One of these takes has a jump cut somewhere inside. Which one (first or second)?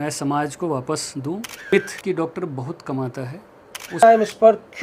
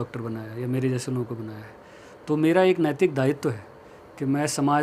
first